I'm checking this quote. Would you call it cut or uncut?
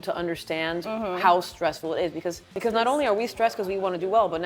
cut